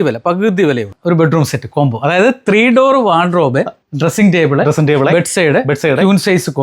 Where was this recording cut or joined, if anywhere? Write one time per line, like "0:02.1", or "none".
0:00.9